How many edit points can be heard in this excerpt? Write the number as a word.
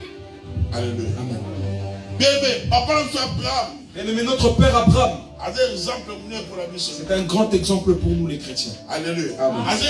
zero